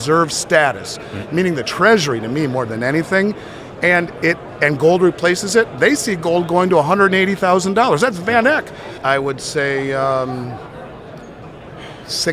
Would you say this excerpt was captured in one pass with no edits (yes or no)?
no